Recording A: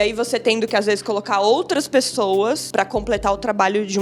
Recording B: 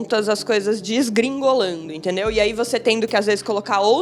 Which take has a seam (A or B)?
A